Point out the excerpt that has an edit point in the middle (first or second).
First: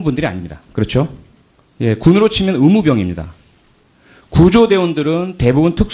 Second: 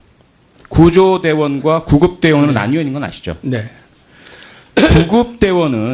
first